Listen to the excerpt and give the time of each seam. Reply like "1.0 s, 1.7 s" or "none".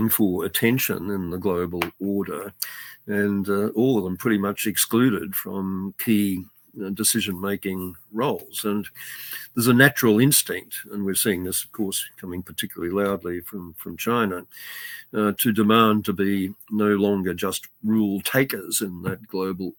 none

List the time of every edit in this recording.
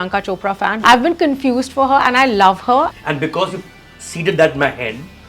0.8 s, 2.9 s

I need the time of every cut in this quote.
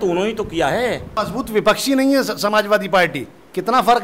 1.2 s

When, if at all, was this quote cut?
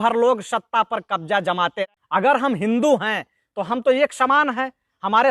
1.8 s

